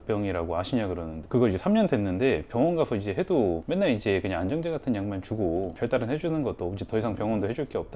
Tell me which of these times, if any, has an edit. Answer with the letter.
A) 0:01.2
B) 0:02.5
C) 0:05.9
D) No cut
A